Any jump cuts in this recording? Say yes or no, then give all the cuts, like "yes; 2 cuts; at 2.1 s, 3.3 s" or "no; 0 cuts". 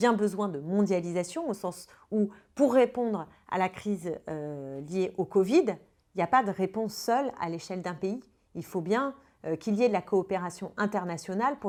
no; 0 cuts